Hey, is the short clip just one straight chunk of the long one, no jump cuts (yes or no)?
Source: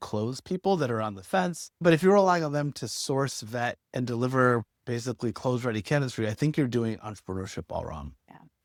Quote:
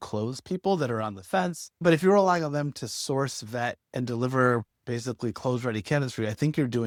yes